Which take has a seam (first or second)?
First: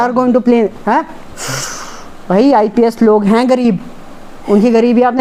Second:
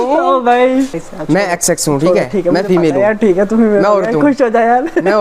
second